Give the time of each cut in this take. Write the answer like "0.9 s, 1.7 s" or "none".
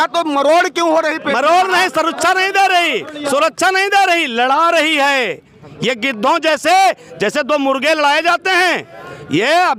none